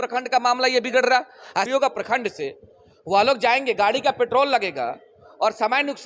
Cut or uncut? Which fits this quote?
cut